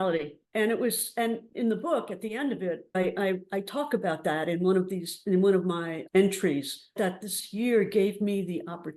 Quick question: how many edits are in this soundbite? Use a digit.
3